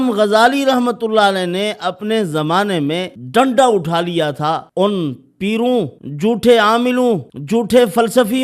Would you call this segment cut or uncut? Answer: cut